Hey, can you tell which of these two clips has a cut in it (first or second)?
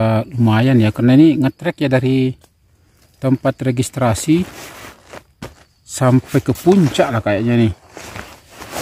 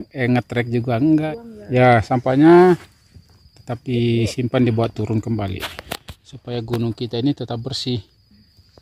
second